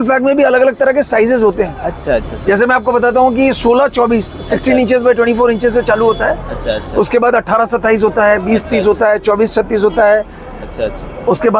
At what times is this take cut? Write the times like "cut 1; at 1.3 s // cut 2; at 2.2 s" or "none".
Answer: none

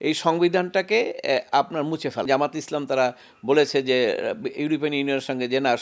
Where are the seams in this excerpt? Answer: cut 1; at 2.3 s

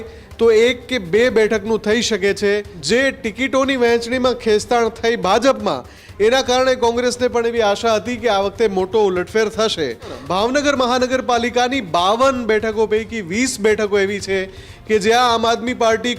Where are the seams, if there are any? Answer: cut 1; at 2.7 s // cut 2; at 10.2 s

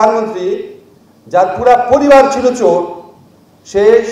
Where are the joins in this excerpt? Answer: none

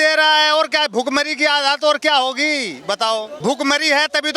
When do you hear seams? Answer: cut 1; at 3.3 s

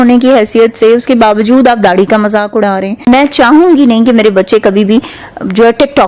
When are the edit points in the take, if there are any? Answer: cut 1; at 3.1 s

